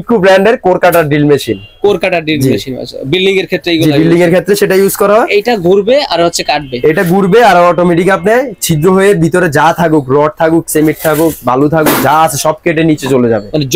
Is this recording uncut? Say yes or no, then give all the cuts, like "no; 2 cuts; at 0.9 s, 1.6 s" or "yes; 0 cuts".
yes; 0 cuts